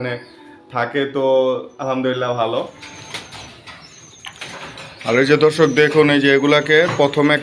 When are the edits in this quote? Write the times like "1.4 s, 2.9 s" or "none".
2.7 s